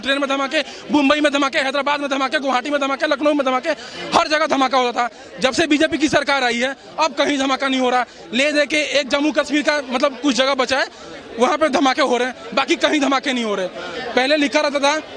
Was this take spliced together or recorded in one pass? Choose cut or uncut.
uncut